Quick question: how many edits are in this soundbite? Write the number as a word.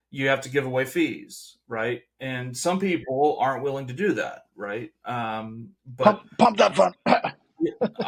zero